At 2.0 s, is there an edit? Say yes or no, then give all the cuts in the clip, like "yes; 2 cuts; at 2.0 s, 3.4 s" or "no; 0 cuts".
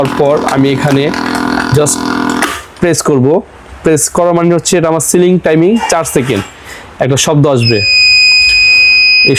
no; 0 cuts